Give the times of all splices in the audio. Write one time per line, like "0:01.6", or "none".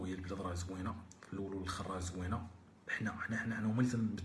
none